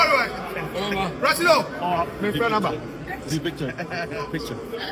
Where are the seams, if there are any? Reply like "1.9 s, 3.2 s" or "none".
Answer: none